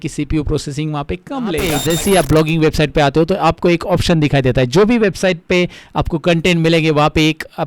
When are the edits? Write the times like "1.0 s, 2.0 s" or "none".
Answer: 1.8 s